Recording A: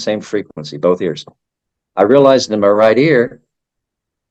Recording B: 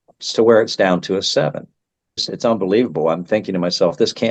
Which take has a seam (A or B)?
B